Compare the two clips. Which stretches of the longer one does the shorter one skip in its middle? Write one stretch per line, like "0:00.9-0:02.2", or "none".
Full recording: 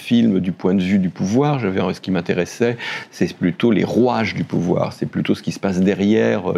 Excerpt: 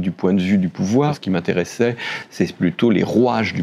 0:01.6-0:02.0

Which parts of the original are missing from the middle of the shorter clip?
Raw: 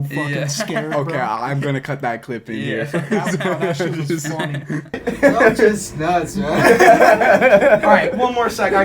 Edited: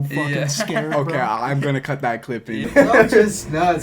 0:02.7-0:05.1

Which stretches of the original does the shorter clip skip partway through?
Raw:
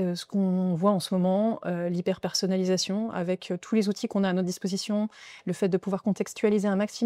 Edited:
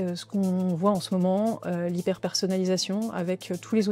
none

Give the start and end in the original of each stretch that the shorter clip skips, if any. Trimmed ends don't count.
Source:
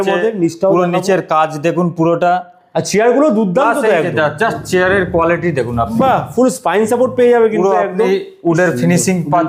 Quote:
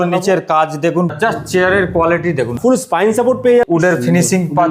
0:02.0-0:04.3
0:05.7-0:06.3
0:07.4-0:08.4

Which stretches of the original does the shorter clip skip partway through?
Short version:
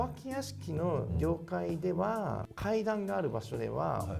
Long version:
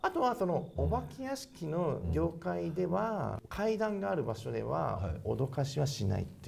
none

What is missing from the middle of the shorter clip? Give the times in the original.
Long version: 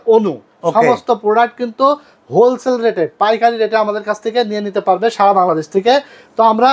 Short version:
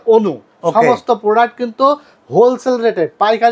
none

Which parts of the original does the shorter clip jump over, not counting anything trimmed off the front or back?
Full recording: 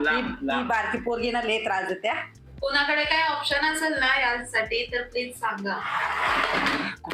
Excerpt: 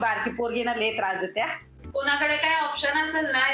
none

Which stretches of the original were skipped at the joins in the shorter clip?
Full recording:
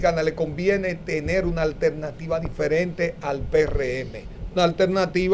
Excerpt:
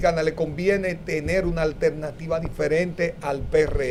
none

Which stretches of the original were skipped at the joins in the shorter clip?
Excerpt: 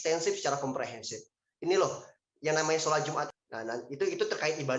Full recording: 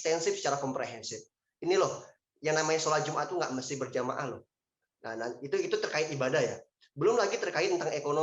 0:03.3-0:04.8

